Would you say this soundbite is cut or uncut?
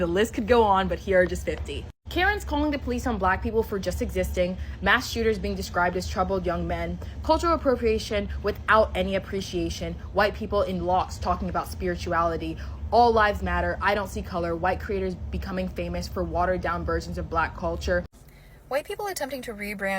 cut